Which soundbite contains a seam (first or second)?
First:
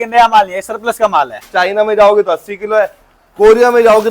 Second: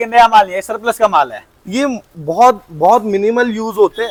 first